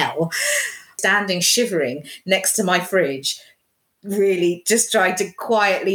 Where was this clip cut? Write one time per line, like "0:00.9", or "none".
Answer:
0:01.0